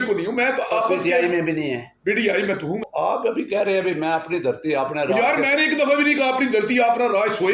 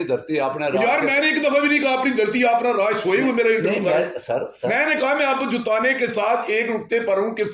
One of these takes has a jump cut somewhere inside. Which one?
first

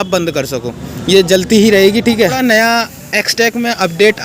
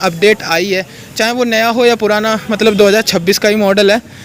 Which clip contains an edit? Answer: first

